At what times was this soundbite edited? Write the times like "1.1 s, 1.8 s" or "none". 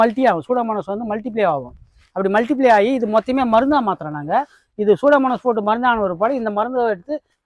none